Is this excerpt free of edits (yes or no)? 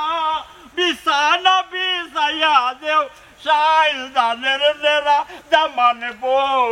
yes